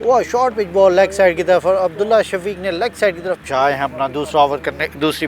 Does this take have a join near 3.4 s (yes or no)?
yes